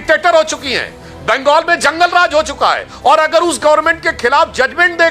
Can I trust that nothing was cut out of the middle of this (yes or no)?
yes